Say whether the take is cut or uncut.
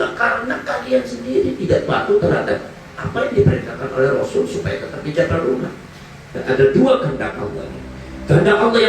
cut